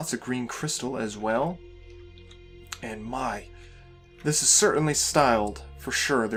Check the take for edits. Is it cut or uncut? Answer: uncut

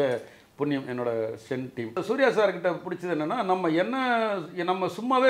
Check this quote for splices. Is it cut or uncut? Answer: cut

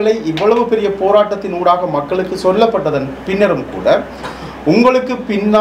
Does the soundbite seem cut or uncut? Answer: uncut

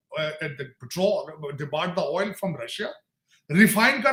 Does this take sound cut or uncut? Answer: uncut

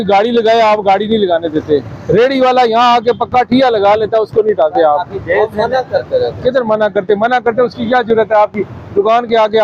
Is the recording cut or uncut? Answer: uncut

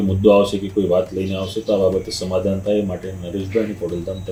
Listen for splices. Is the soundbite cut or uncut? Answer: uncut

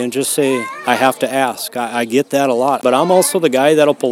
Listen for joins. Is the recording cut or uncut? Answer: cut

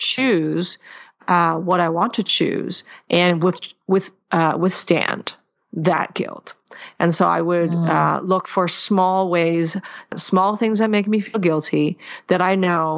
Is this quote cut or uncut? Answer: cut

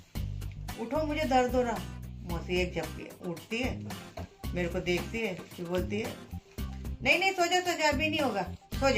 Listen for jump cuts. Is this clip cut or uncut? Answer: uncut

